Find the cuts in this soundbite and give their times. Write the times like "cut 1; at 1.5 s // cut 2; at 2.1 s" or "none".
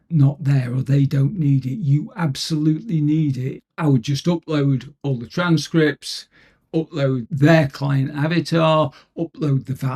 cut 1; at 3.7 s // cut 2; at 7.3 s